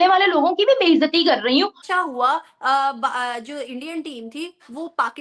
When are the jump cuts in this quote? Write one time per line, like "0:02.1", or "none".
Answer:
0:01.8